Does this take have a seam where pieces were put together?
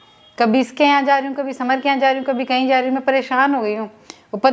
no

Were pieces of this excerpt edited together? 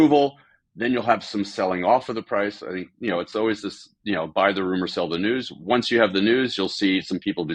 no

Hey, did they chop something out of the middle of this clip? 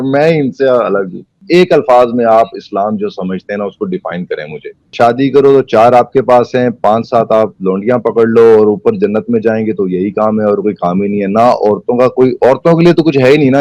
yes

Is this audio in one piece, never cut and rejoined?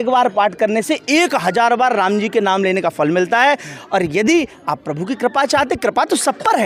yes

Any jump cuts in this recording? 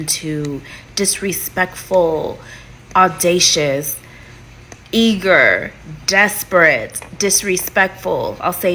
no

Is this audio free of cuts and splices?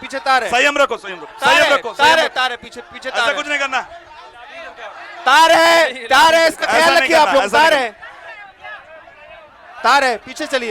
yes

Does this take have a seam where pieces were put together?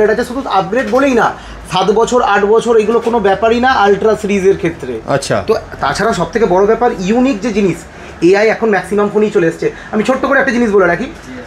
no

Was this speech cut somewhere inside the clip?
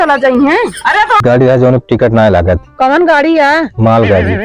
yes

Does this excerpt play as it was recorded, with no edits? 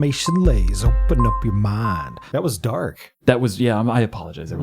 no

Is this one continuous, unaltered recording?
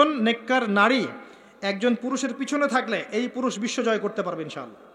yes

